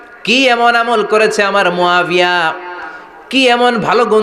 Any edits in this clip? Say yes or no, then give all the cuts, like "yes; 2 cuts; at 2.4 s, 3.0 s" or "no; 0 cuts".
no; 0 cuts